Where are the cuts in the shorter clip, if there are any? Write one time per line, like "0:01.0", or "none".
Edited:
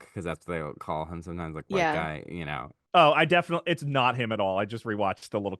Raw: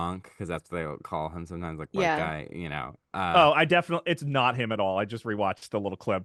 0:02.9